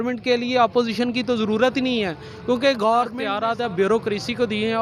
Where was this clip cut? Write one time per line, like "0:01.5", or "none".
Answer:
0:03.2